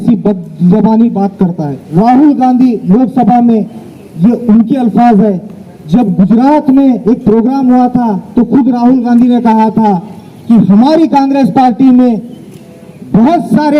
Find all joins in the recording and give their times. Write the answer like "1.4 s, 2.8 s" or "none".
1.8 s